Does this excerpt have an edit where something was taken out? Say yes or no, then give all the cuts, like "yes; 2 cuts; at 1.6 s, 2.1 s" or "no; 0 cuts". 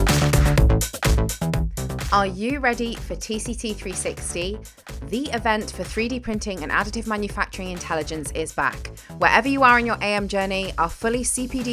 yes; 1 cut; at 1.9 s